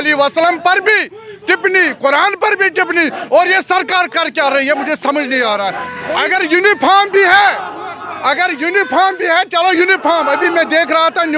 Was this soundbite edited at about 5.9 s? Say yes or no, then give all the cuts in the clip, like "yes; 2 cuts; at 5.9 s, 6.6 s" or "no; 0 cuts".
yes; 1 cut; at 5.9 s